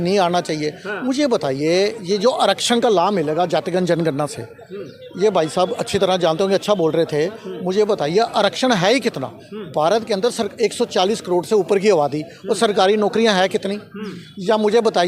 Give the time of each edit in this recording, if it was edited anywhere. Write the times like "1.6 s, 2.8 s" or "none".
none